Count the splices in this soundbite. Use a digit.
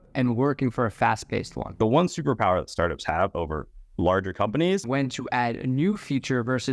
2